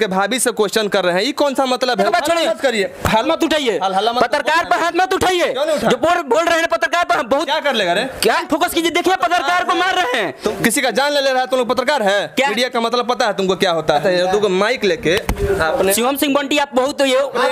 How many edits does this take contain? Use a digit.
6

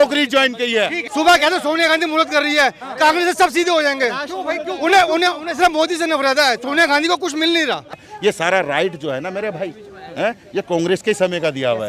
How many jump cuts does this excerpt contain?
2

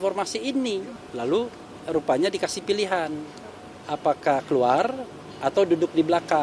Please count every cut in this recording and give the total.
1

